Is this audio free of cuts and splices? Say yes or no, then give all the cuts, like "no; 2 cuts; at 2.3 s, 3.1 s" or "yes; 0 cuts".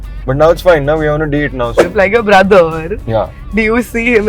no; 1 cut; at 1.8 s